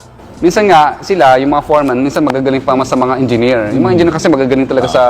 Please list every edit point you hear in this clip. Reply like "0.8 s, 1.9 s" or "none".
3.8 s